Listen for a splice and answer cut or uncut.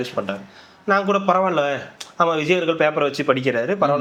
uncut